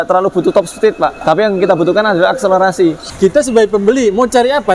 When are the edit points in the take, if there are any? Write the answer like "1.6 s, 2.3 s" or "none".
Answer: 1.2 s, 3.0 s